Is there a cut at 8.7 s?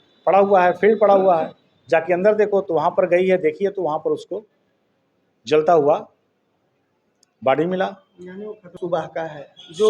yes; 1 cut; at 8.7 s

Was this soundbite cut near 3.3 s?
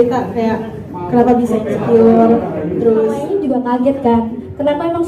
yes; 1 cut; at 3.3 s

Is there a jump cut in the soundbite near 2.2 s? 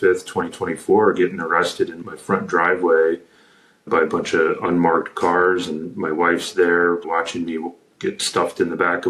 no; 0 cuts

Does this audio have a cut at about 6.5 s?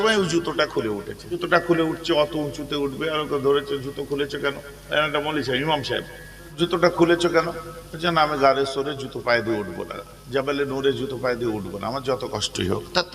yes; 2 cuts; at 1.4 s, 6.5 s

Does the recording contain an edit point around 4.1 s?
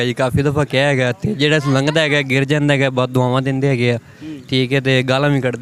no; 0 cuts

